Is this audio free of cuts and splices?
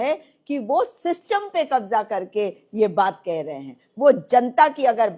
yes; 0 cuts

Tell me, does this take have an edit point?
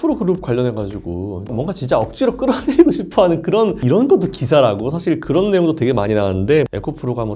yes; 3 cuts; at 1.5 s, 3.8 s, 6.7 s

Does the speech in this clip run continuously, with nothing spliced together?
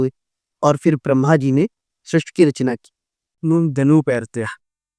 no; 1 cut; at 3.3 s

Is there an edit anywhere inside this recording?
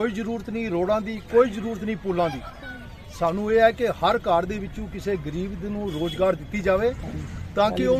no; 0 cuts

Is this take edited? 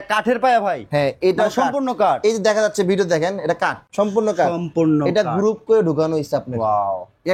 no; 0 cuts

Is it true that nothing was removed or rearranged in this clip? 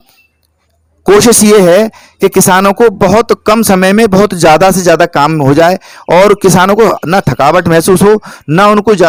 yes; 0 cuts

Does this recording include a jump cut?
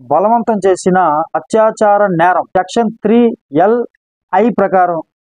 yes; 3 cuts; at 1.4 s, 2.5 s, 3.4 s

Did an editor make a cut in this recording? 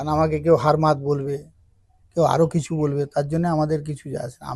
no; 0 cuts

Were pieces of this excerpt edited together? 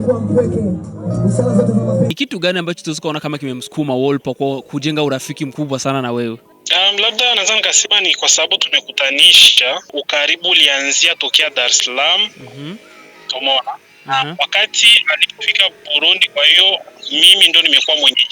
yes; 3 cuts; at 2.1 s, 6.5 s, 9.9 s

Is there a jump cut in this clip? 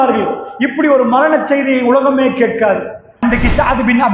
yes; 1 cut; at 3.0 s

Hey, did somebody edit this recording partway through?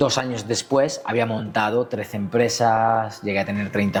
no; 0 cuts

